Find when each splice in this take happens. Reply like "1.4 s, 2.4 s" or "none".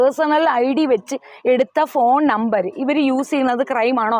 none